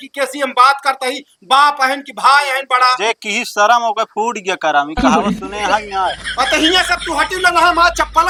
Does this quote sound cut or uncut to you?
uncut